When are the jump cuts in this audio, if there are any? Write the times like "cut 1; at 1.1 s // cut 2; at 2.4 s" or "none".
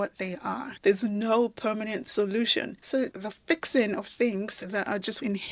cut 1; at 2.8 s